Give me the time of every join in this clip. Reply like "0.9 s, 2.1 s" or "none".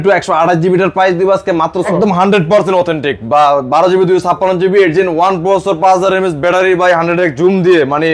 1.9 s